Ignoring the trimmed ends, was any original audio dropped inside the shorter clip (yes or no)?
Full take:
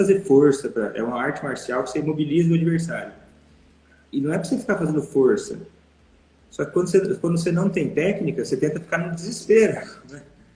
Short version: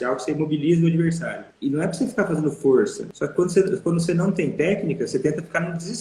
yes